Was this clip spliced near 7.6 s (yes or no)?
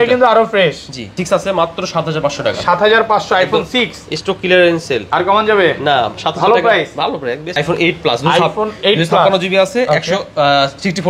yes